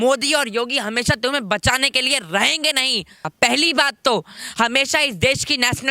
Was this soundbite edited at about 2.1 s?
no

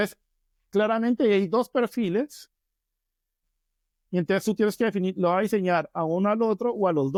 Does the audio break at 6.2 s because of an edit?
no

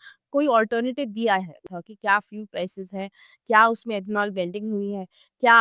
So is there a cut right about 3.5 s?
no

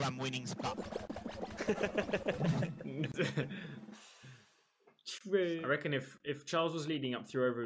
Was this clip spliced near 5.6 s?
yes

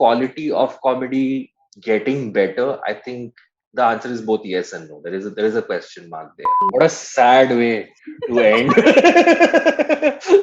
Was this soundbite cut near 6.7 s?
yes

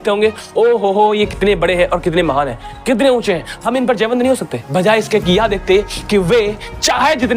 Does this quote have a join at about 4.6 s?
yes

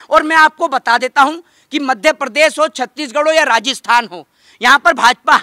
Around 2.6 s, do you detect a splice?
no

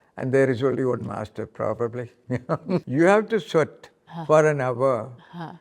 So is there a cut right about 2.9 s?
yes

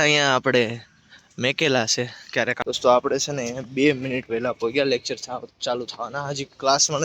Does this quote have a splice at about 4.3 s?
no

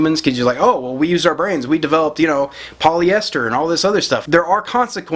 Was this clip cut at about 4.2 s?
yes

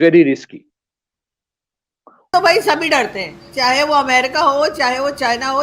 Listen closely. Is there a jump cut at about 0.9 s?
no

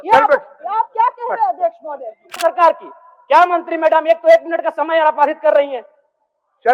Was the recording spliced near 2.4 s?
yes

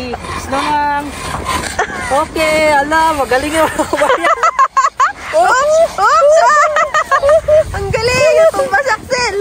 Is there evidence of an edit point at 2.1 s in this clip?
no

